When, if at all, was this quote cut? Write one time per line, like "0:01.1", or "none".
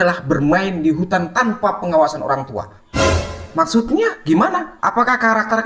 0:02.8